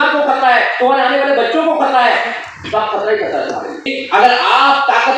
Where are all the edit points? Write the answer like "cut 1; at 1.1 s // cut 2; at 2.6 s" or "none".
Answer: cut 1; at 4.0 s